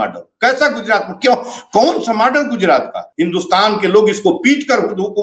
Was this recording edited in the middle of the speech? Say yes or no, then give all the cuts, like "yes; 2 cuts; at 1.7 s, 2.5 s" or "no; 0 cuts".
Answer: yes; 1 cut; at 3.0 s